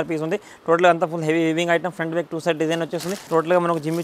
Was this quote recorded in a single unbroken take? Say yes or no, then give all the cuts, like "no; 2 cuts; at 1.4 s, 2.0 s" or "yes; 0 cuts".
no; 1 cut; at 3.1 s